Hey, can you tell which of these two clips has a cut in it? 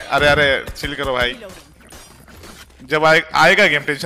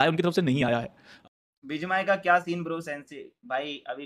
second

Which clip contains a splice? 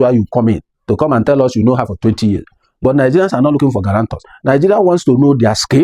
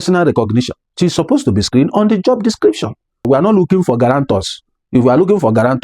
second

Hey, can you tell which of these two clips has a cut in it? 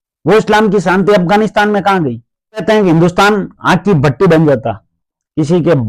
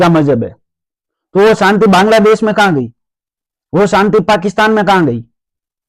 first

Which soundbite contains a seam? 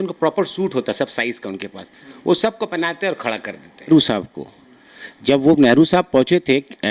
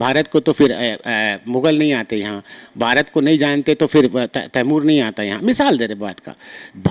first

